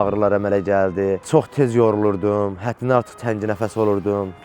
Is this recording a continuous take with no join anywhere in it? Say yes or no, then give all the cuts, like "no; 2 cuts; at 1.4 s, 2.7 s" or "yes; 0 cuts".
no; 1 cut; at 1.2 s